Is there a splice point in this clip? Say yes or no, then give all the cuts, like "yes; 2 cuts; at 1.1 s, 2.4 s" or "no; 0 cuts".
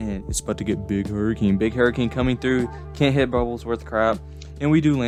no; 0 cuts